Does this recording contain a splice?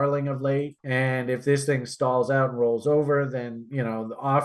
no; 0 cuts

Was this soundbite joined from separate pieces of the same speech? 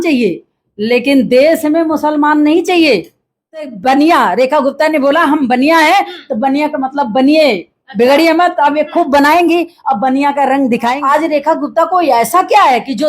yes; 2 cuts; at 3.7 s, 10.9 s

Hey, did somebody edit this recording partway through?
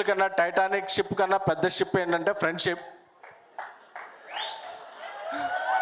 no; 0 cuts

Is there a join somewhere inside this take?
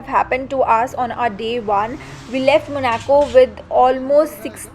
no; 0 cuts

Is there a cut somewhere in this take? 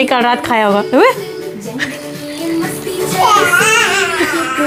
no; 0 cuts

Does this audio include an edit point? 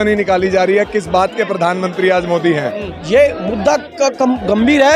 yes; 1 cut; at 2.9 s

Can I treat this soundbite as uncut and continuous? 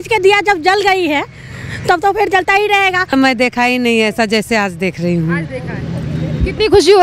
no; 1 cut; at 3.1 s

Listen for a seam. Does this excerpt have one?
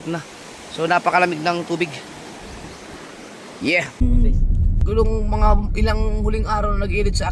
yes; 1 cut; at 4.0 s

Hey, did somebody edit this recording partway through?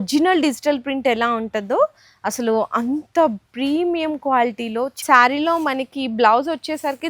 yes; 1 cut; at 5.0 s

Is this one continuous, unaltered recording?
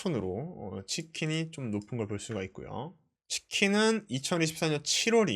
no; 1 cut; at 3.1 s

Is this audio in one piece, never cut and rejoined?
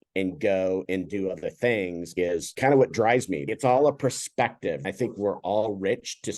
no; 3 cuts; at 2.1 s, 3.5 s, 4.9 s

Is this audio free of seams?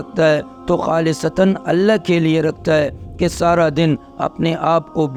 yes; 0 cuts

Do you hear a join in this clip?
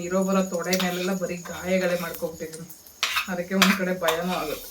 no; 0 cuts

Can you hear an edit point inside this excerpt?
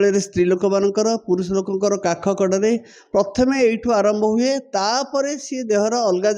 no; 0 cuts

